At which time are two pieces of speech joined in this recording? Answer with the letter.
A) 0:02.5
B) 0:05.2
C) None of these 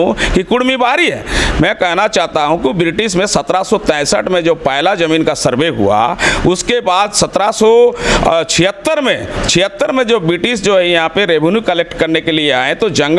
C